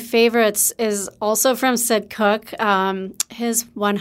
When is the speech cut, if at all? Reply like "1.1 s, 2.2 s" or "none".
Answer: none